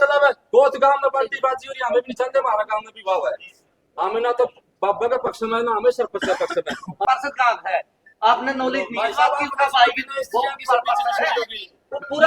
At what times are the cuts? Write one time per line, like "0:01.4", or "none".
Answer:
0:07.0